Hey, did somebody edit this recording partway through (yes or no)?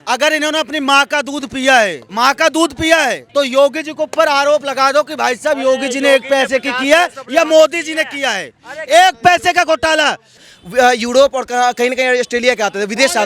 yes